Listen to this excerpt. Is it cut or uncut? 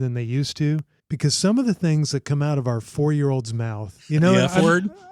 cut